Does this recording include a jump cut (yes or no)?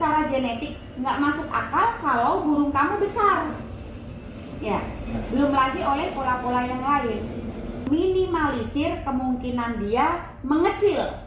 yes